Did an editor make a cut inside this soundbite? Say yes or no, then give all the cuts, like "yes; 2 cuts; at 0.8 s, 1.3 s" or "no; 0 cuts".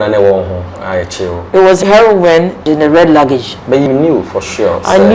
yes; 3 cuts; at 1.8 s, 2.6 s, 3.9 s